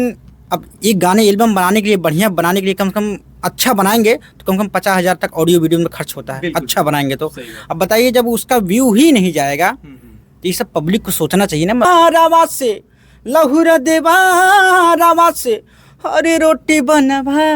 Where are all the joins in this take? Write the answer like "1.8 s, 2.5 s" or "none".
11.9 s

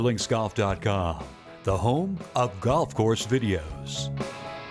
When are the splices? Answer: 3.8 s

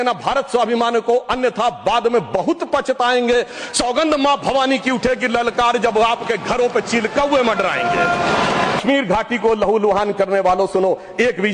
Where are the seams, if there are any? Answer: 8.8 s

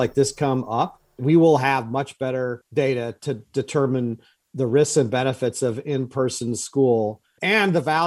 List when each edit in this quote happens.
1.2 s, 2.6 s

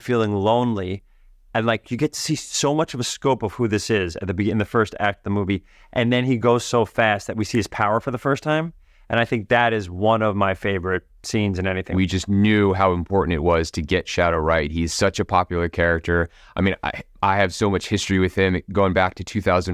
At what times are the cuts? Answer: 11.9 s

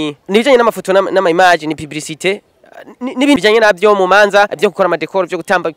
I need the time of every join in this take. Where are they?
3.4 s, 4.5 s

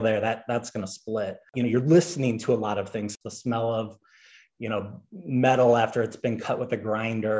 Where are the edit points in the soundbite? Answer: 1.5 s, 3.1 s

